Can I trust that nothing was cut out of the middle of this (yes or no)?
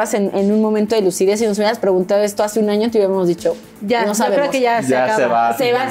yes